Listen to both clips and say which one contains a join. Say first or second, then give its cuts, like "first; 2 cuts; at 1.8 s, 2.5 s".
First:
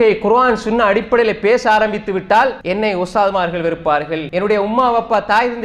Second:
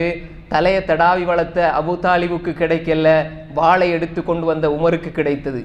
first; 2 cuts; at 2.6 s, 4.2 s